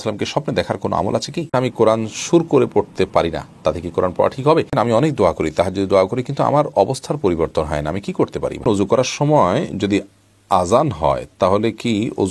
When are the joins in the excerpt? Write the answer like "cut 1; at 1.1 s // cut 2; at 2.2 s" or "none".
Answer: cut 1; at 1.5 s // cut 2; at 4.7 s // cut 3; at 8.6 s